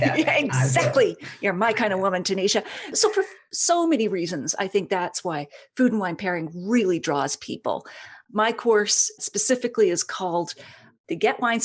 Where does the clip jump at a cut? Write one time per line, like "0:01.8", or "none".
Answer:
0:03.5